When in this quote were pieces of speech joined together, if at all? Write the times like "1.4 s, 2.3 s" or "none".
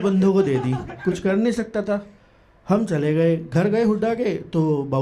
none